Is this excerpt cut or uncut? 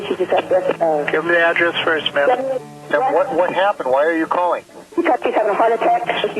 cut